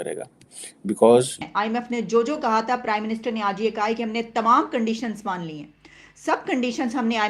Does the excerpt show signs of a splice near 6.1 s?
no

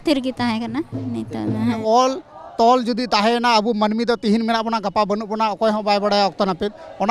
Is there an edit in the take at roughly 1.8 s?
yes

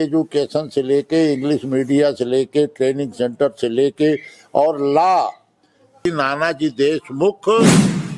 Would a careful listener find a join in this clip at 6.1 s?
yes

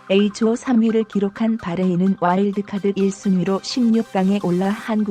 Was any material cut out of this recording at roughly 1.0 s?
no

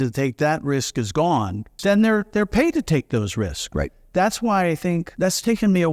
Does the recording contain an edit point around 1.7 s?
yes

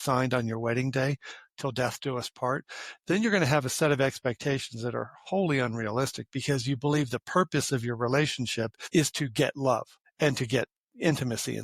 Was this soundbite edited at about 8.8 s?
yes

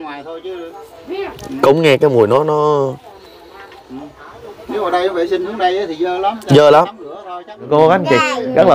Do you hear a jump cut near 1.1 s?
no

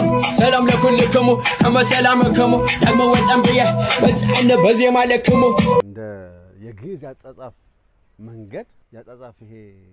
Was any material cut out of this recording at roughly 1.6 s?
no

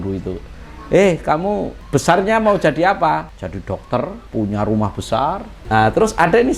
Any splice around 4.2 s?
yes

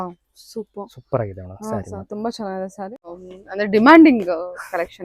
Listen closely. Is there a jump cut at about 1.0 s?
no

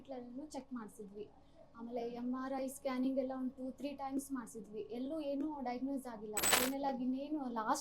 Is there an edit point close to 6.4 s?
yes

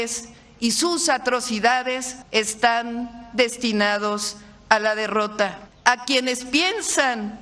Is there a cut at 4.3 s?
no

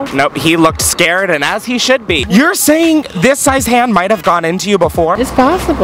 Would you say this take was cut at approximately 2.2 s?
yes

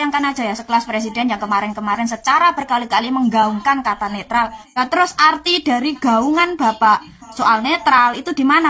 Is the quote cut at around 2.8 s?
no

